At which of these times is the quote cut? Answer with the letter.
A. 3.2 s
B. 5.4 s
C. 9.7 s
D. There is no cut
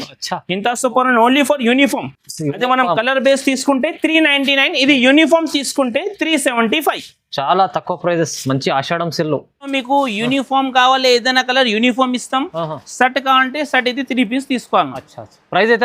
C